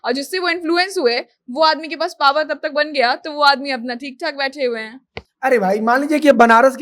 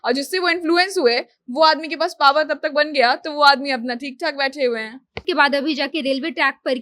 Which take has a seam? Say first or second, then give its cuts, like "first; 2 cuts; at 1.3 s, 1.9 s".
second; 1 cut; at 5.2 s